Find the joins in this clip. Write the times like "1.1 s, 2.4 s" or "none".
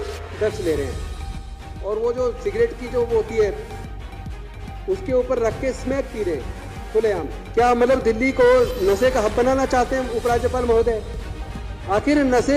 7.4 s

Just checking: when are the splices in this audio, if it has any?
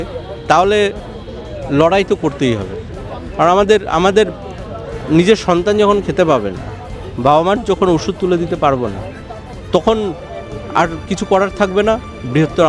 none

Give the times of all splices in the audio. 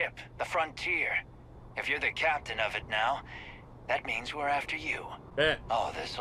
5.2 s

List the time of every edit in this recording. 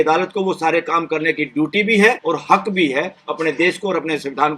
2.2 s

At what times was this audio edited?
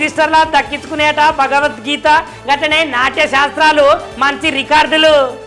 none

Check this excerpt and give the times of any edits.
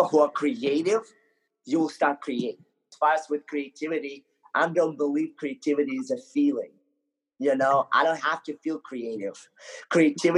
2.9 s

